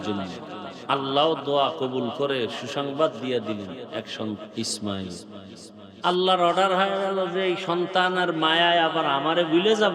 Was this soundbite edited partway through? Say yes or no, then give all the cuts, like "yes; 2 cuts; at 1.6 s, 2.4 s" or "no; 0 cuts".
yes; 1 cut; at 4.4 s